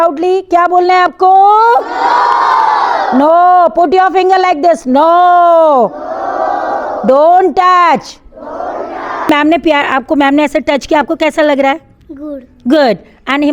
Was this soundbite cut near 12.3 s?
no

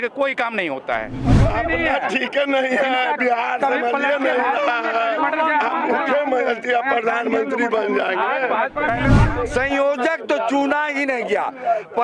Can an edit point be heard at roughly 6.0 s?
no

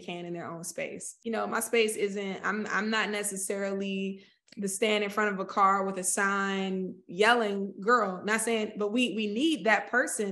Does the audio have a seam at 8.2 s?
no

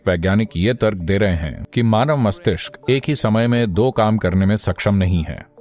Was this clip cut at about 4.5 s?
no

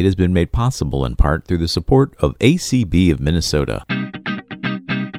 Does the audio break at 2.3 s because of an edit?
no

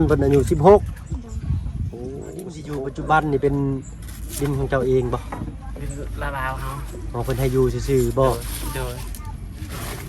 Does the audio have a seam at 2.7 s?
yes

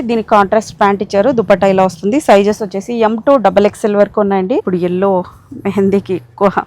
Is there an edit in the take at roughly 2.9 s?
no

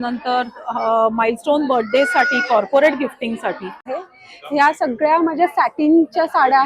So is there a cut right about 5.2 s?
no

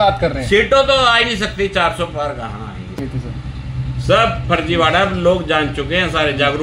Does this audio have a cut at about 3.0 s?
yes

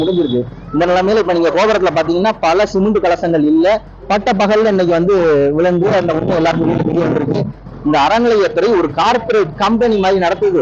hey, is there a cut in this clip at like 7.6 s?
yes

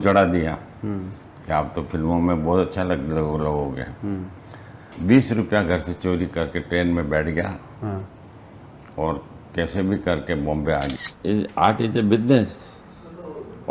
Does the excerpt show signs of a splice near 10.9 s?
yes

